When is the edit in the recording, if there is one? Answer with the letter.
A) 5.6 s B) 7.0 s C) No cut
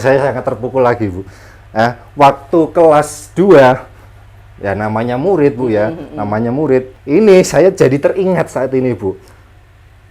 B